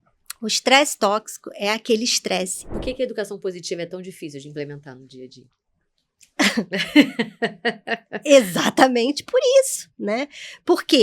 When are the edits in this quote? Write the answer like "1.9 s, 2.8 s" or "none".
2.6 s